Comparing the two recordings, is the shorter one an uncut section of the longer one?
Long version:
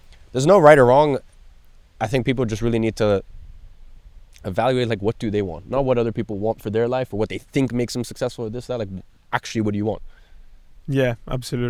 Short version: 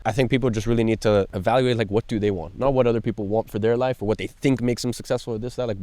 no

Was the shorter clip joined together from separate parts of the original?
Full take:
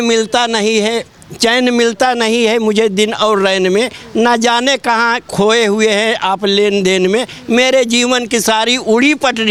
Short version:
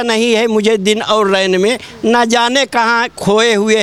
no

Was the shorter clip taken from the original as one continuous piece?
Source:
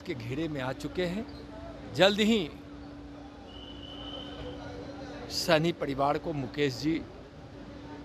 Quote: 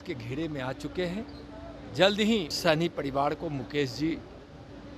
no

